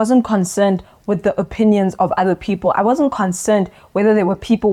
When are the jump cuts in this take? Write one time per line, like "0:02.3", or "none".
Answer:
none